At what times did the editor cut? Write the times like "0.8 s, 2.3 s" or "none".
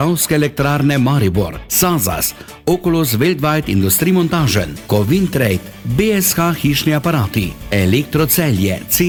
none